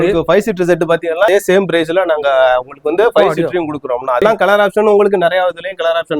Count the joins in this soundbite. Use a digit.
2